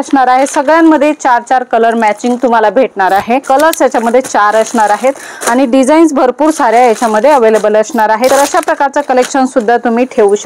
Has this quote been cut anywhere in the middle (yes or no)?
yes